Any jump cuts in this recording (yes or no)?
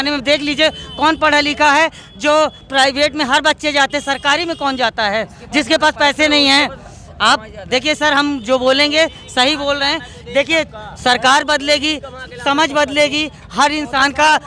no